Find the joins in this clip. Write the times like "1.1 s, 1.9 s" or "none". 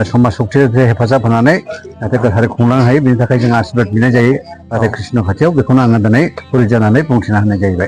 none